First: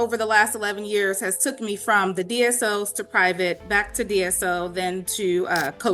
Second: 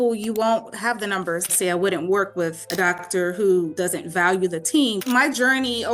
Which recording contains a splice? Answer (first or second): second